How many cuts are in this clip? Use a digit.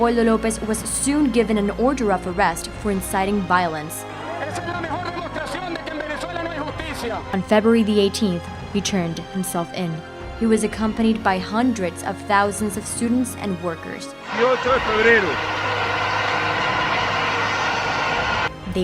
1